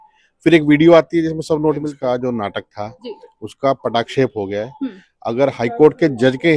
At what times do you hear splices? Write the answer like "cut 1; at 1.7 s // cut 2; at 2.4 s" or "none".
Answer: cut 1; at 1.9 s